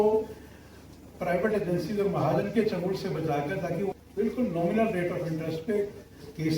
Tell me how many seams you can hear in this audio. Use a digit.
1